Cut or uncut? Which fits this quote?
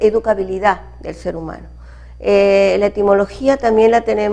cut